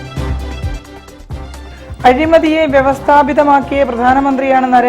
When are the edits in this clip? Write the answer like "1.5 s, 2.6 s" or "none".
1.6 s